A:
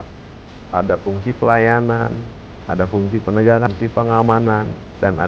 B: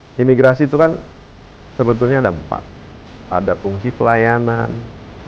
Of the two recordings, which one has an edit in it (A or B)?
A